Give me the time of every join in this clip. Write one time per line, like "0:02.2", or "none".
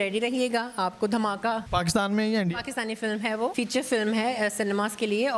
0:01.6
0:03.5